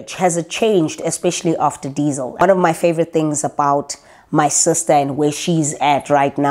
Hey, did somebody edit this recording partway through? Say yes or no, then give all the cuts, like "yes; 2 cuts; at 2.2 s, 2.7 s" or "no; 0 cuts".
yes; 1 cut; at 2.4 s